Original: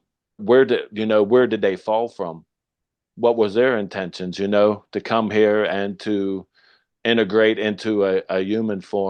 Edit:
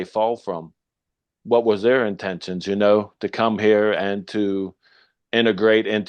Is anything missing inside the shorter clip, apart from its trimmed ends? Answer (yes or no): no